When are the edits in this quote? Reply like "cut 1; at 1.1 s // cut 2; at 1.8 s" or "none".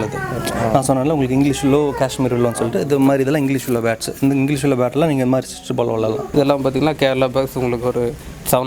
cut 1; at 6.3 s